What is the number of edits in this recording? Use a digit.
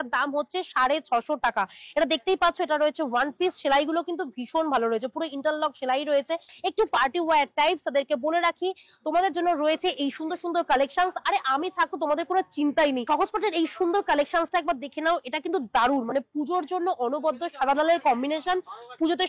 2